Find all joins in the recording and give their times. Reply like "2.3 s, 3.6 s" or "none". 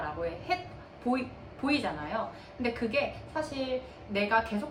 none